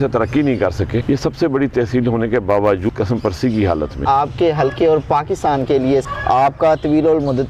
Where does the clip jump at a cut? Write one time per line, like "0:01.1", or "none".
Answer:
0:01.0
0:02.9
0:04.0
0:06.0